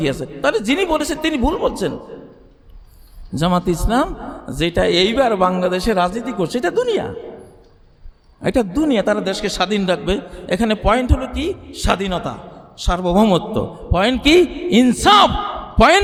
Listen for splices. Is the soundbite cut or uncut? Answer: uncut